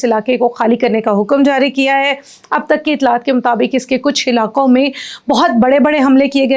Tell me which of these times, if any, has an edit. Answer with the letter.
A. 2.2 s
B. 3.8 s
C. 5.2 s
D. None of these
D